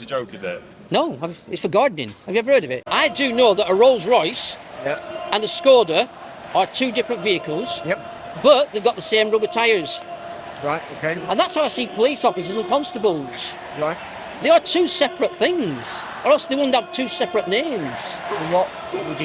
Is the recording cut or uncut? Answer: cut